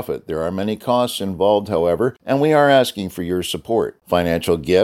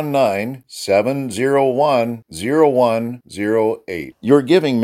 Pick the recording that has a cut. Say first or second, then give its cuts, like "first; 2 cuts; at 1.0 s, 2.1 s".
first; 1 cut; at 2.2 s